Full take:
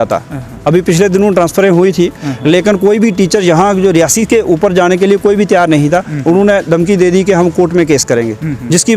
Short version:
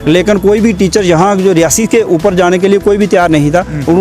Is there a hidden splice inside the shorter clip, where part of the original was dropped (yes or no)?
no